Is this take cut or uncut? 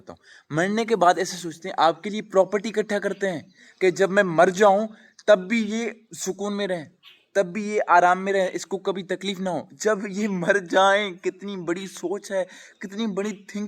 uncut